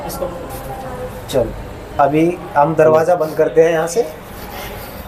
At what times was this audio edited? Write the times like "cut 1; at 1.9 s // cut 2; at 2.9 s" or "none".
none